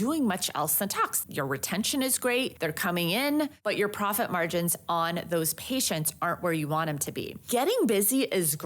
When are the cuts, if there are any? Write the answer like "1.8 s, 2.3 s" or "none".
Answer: 1.2 s, 2.5 s, 3.6 s, 7.4 s